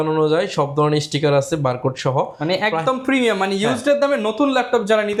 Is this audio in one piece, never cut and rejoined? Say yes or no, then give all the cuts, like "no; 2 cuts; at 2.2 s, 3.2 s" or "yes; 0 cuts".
yes; 0 cuts